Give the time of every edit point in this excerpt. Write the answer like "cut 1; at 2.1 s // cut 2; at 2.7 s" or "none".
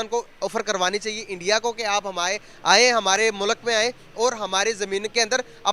none

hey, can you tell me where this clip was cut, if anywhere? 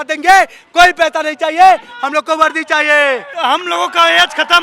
cut 1; at 3.3 s

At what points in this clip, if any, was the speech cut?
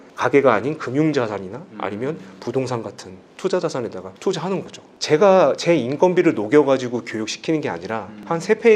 cut 1; at 4.9 s

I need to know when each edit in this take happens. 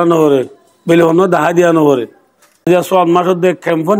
cut 1; at 2.7 s

